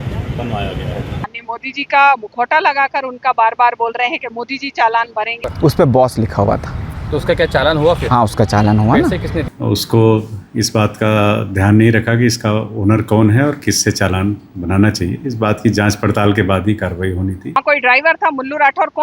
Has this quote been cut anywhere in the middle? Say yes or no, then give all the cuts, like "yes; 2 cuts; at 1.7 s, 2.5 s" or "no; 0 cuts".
yes; 4 cuts; at 1.3 s, 5.4 s, 9.4 s, 17.6 s